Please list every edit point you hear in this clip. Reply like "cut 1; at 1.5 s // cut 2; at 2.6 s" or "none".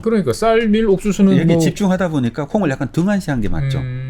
none

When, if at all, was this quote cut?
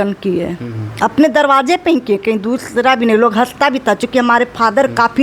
none

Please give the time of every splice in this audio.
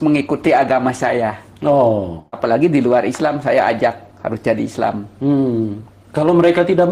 cut 1; at 2.3 s

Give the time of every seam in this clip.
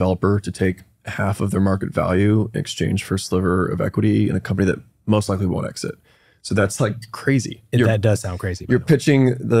cut 1; at 7.7 s

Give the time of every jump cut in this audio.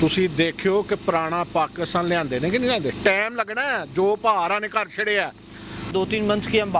cut 1; at 5.9 s

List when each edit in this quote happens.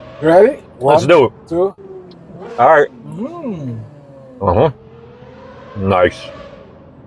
none

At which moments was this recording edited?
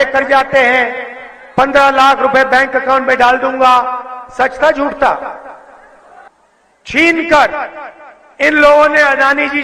cut 1; at 6.2 s

